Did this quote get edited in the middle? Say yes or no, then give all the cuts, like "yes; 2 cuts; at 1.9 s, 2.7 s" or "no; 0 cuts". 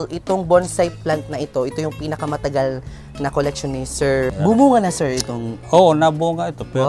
yes; 1 cut; at 4.3 s